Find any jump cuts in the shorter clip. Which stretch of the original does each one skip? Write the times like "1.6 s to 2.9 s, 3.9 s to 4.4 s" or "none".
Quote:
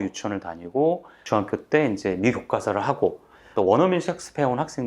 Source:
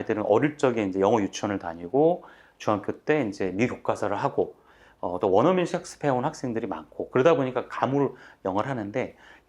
2.3 s to 2.5 s, 4.8 s to 5.1 s